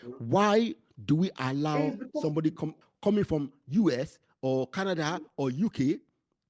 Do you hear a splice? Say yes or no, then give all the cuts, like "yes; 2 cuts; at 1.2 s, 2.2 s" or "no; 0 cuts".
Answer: yes; 1 cut; at 2.8 s